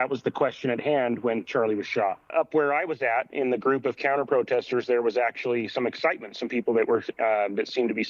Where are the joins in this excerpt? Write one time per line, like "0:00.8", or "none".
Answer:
0:02.3